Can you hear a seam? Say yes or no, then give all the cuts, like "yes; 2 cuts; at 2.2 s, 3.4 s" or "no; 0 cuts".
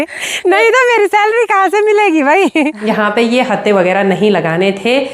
yes; 1 cut; at 2.8 s